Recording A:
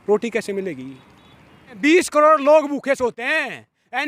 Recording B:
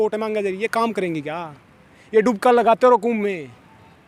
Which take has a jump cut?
A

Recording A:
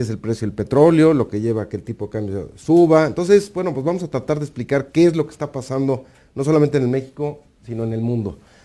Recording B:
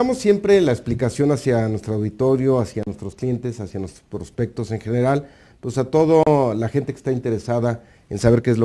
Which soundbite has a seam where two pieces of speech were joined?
B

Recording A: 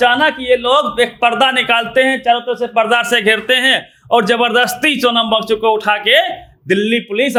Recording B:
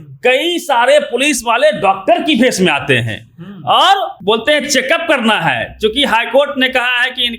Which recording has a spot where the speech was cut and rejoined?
B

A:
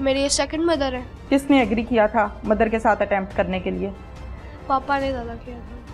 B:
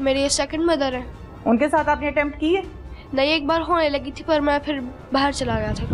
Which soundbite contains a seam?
A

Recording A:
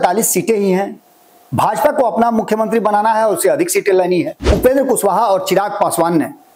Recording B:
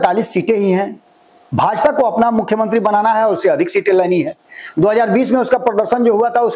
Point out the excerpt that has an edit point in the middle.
A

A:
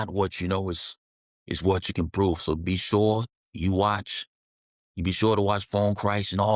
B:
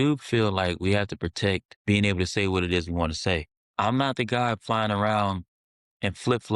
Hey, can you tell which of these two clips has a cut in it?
B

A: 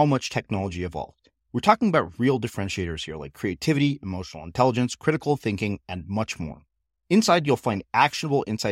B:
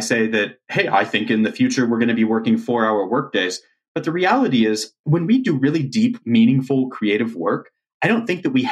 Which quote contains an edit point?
B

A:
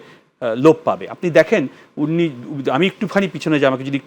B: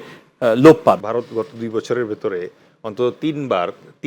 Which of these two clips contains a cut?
B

